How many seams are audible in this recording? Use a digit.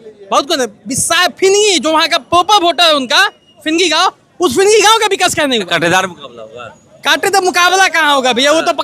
1